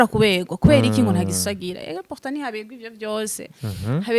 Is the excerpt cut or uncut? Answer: uncut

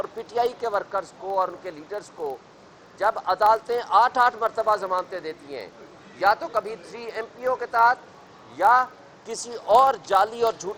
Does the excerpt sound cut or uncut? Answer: uncut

